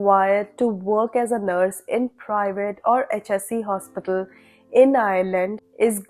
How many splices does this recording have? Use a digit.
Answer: 0